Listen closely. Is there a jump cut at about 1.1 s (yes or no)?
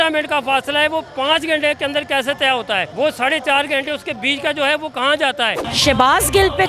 no